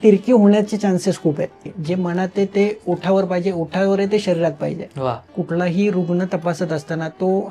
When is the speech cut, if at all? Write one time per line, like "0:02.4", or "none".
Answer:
0:01.7
0:05.3